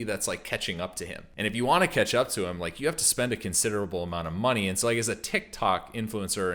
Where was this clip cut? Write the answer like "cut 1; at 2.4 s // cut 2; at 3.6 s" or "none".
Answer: cut 1; at 1.2 s